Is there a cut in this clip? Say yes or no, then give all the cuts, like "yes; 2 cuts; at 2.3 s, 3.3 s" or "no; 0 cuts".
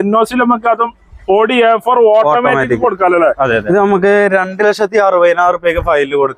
yes; 1 cut; at 3.6 s